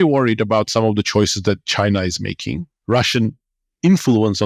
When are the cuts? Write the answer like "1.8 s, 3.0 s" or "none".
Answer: 2.7 s